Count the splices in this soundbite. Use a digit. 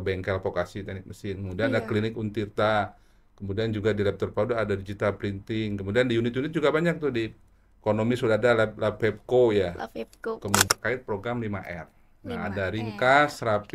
1